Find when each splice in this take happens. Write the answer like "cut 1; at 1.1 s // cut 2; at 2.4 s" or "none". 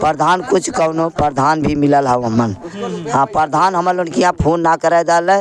none